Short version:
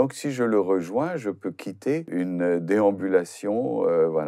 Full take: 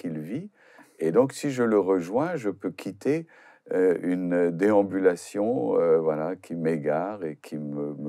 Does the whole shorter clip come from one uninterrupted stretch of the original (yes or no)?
no